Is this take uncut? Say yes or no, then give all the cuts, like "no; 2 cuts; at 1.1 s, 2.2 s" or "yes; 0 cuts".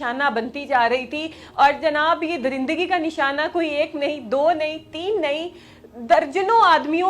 yes; 0 cuts